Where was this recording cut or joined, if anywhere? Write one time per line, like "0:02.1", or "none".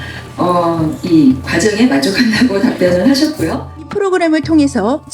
0:03.9